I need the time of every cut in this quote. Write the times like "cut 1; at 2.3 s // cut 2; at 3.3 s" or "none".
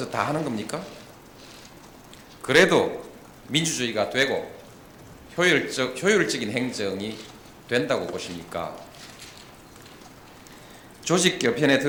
none